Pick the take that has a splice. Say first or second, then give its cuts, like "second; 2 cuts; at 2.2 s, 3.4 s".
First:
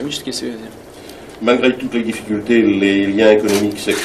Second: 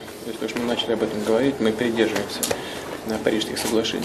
second; 1 cut; at 1.3 s